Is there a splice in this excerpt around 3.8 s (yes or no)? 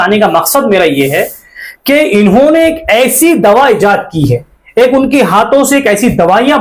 no